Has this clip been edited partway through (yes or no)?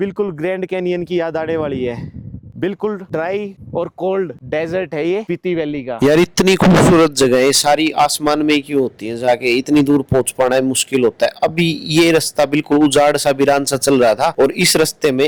no